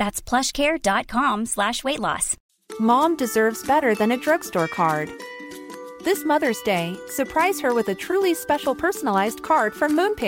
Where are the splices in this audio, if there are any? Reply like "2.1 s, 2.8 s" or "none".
2.3 s

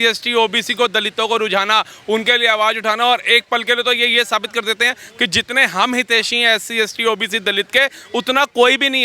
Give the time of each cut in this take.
none

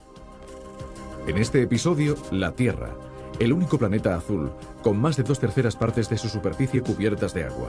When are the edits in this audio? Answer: none

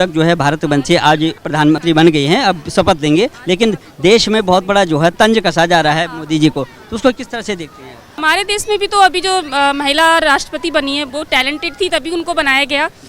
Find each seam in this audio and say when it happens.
1.6 s, 3.4 s, 5.1 s, 8.1 s

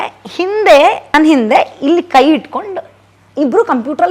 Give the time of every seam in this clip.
1.0 s

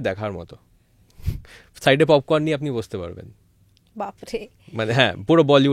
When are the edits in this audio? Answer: none

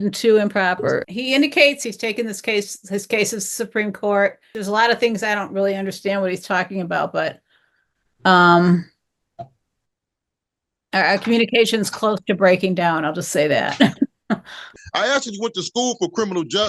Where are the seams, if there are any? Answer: 1.0 s, 1.8 s, 4.5 s, 14.8 s

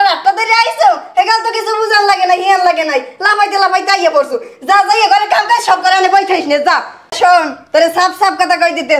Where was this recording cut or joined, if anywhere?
none

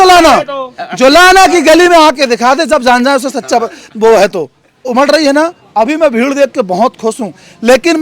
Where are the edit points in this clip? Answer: 4.9 s

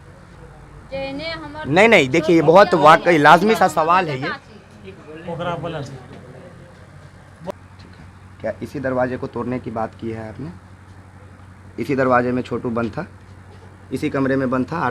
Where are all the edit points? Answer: 7.5 s

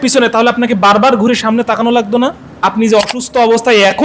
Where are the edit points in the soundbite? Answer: 2.5 s

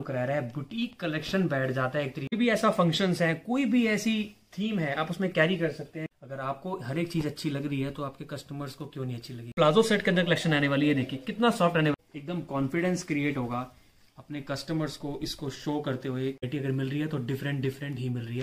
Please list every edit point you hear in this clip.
2.3 s, 6.1 s, 9.5 s, 11.9 s, 16.5 s

